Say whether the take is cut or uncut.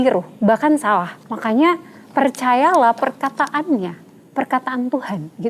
cut